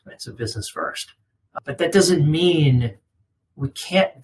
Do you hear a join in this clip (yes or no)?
yes